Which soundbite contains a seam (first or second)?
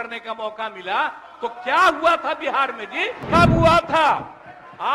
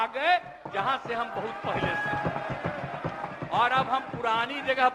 first